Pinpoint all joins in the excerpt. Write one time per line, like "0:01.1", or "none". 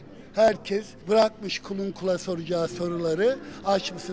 0:00.9